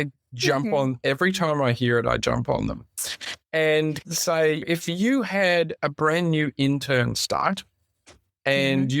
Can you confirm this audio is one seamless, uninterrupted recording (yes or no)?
yes